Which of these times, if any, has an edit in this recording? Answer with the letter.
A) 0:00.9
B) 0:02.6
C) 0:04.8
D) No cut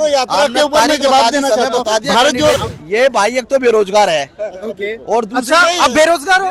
B